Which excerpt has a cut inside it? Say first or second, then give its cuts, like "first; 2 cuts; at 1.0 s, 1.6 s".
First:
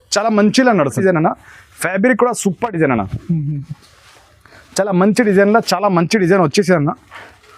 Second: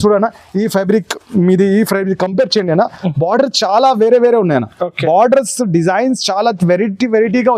first; 1 cut; at 0.9 s